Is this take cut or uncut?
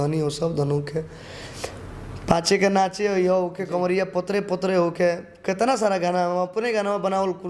uncut